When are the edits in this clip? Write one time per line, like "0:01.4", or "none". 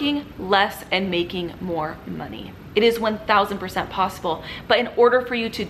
none

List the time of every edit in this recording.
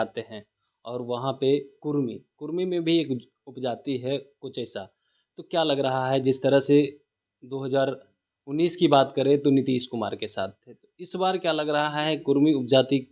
none

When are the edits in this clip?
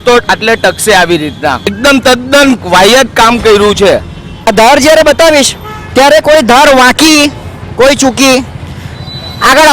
0:01.7
0:04.5

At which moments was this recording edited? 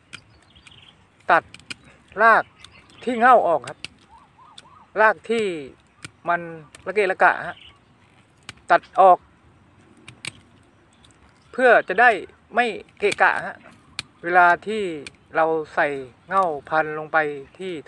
none

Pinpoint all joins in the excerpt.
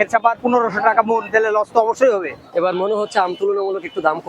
0:02.4

